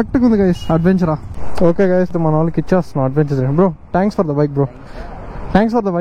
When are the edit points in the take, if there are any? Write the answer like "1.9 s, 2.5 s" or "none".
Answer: none